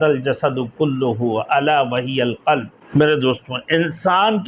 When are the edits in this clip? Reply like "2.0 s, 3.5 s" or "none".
2.8 s